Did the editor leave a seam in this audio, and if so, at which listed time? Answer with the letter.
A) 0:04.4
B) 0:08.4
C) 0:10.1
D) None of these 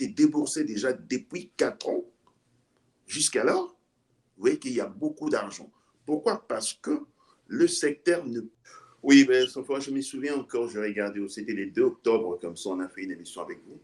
B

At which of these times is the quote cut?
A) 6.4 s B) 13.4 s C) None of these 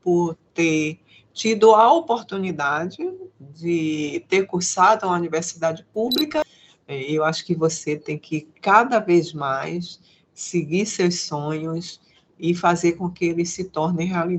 A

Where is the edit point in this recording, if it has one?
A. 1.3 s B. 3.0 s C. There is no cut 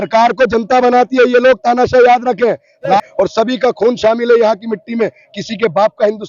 B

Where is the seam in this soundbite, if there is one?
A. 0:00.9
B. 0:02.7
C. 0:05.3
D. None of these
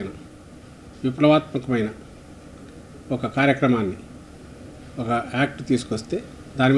D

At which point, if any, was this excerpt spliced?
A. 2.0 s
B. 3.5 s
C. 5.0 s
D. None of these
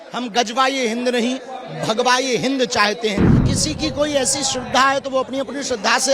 B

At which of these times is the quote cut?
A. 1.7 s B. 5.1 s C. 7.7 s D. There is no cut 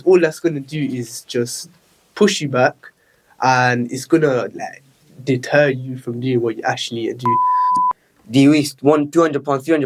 C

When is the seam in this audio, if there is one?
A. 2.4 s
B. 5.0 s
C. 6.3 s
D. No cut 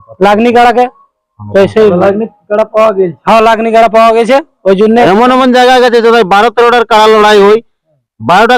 B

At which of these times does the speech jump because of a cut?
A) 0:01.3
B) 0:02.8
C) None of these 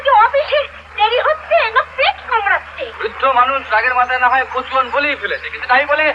B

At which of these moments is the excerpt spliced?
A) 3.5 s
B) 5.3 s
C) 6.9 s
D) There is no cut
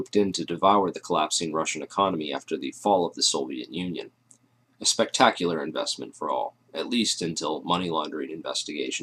C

